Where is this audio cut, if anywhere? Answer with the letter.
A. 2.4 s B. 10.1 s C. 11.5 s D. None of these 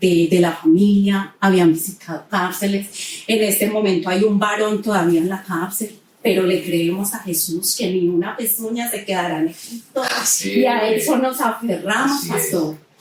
D